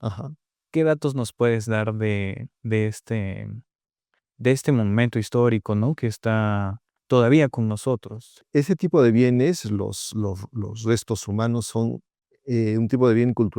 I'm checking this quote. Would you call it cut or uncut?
cut